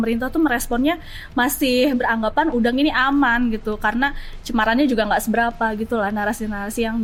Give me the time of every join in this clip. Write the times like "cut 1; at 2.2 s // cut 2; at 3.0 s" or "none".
none